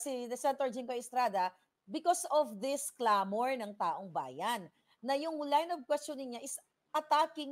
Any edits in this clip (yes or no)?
no